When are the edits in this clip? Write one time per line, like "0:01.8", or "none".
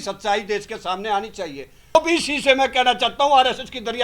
0:01.9